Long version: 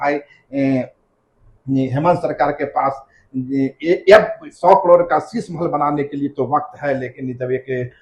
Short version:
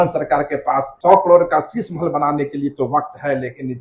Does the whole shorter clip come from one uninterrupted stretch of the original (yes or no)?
no